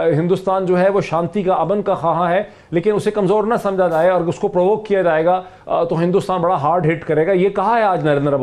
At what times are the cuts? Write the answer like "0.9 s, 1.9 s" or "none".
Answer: none